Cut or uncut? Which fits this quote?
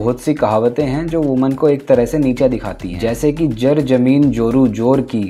uncut